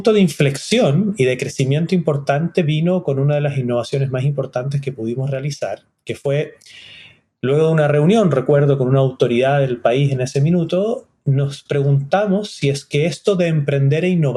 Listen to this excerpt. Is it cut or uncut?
uncut